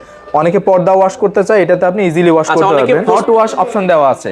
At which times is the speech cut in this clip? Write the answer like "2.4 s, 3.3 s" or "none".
3.1 s